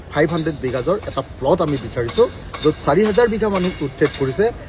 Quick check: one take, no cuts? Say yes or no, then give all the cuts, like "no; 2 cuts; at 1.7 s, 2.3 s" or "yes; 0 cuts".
yes; 0 cuts